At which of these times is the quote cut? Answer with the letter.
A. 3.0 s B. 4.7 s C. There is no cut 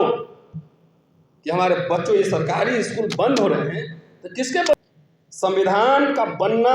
B